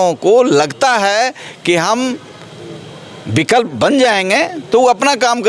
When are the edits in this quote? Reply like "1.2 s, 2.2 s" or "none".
none